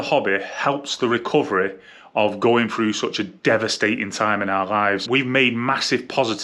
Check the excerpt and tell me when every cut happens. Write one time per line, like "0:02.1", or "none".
0:05.0